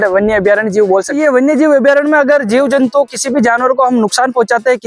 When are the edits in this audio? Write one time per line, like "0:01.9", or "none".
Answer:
0:01.1